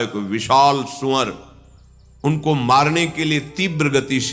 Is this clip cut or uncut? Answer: uncut